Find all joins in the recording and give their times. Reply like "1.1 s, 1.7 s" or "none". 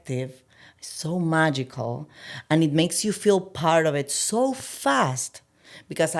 none

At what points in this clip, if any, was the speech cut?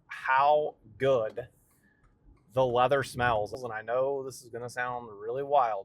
3.6 s

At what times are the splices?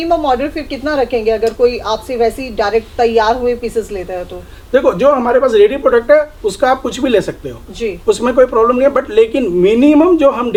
none

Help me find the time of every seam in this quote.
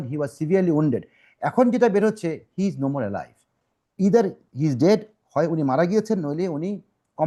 none

